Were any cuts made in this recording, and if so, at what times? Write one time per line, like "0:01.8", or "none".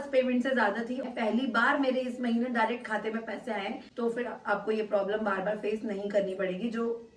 0:01.0
0:03.8